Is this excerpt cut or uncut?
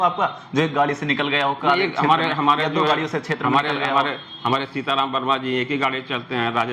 uncut